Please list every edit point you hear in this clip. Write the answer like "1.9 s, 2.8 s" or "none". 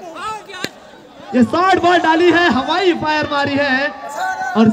none